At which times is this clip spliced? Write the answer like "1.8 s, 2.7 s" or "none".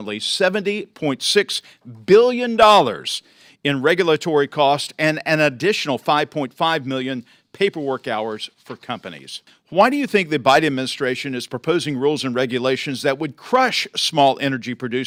none